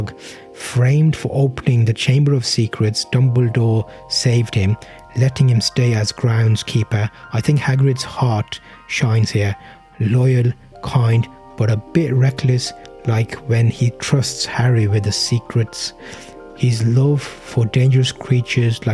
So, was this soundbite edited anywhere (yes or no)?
no